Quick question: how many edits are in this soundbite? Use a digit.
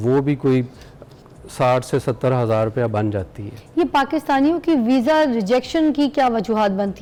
0